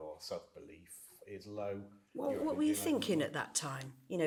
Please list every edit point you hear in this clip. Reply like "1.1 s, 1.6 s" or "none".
none